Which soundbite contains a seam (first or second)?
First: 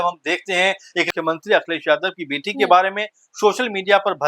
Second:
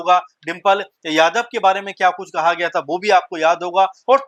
first